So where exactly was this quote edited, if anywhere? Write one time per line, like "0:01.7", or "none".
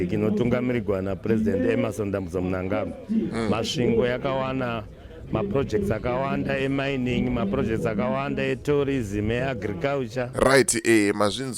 0:10.3